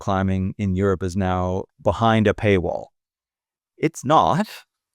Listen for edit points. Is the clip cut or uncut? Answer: cut